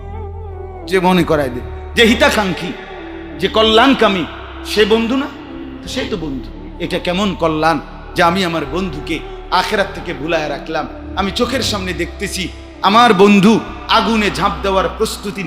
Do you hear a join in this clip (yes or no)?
yes